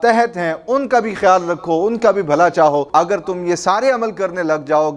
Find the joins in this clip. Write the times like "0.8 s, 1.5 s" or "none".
2.9 s